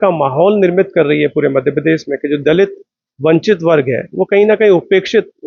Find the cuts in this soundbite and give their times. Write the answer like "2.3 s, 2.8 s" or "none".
none

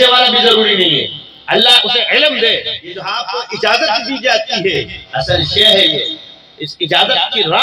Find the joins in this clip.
3.1 s

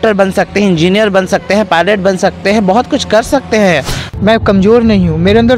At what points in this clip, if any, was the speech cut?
4.1 s

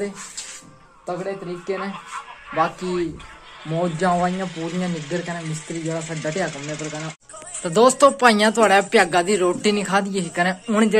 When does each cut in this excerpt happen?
7.1 s

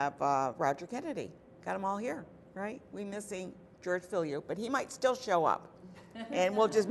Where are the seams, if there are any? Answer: 4.8 s

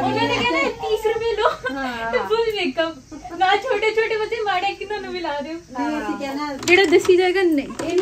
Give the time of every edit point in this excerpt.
6.5 s

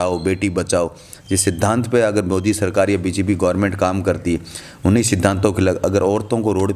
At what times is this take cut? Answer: none

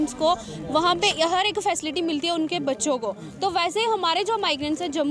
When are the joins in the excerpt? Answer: none

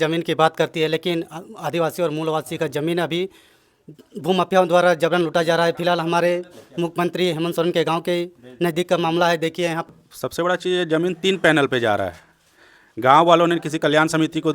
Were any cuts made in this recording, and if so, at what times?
9.9 s

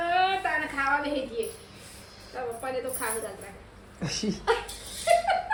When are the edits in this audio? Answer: none

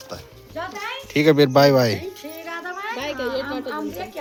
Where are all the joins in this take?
none

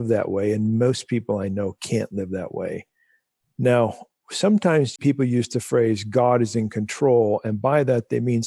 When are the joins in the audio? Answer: 5.0 s

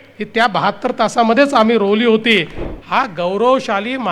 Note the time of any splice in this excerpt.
2.6 s

